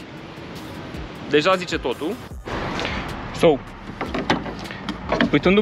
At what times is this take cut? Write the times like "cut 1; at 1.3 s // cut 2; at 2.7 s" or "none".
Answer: cut 1; at 2.3 s